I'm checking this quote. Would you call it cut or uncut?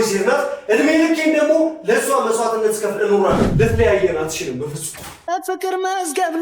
cut